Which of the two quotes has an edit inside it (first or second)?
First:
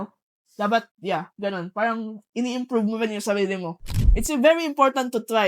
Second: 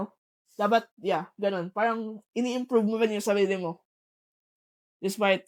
first